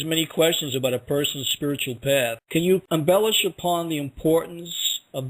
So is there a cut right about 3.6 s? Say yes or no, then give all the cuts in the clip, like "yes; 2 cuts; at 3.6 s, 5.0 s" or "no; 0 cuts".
no; 1 cut; at 1.8 s